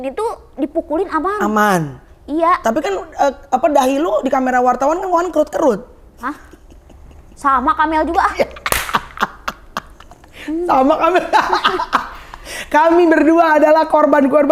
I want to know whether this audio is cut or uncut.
uncut